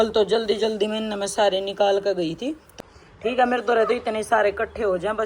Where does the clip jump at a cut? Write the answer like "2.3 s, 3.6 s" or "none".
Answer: 2.7 s